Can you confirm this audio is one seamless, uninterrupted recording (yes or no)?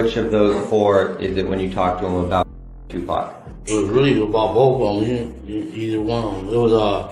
yes